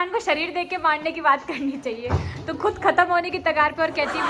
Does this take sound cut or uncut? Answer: uncut